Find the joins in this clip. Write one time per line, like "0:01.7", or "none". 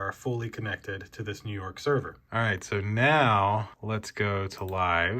0:02.2